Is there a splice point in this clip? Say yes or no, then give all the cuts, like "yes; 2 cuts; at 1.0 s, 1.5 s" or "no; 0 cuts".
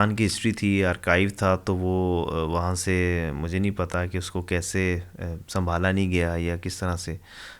no; 0 cuts